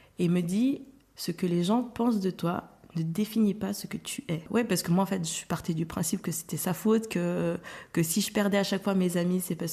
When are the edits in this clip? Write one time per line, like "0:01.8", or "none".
0:04.4